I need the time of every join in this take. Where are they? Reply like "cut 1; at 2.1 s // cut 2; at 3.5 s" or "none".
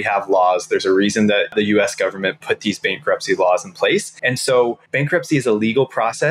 cut 1; at 1.5 s // cut 2; at 4.1 s // cut 3; at 4.8 s